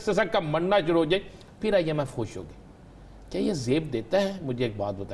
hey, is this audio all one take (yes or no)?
yes